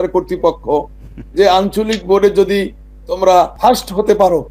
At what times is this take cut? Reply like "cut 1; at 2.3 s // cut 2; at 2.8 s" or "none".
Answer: cut 1; at 3.5 s